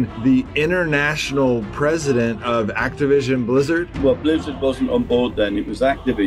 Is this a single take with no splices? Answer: yes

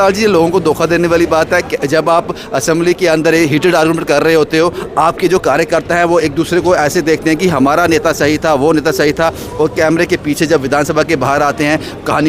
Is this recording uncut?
yes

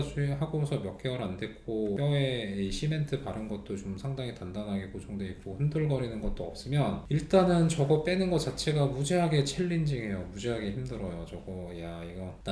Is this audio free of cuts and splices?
yes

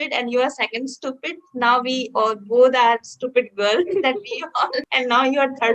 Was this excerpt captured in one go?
no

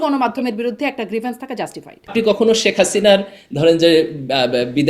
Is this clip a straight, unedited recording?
no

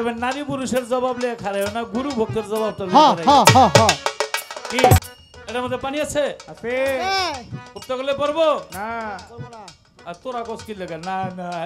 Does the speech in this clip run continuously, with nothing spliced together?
no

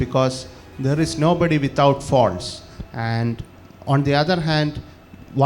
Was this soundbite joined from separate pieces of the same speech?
no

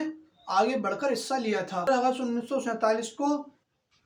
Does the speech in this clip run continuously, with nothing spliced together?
yes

